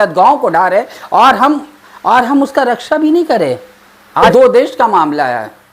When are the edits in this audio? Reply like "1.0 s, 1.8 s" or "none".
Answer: 4.3 s